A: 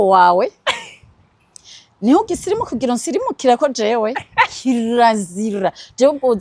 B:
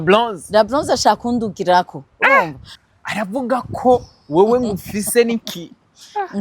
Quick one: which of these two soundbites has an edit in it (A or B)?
B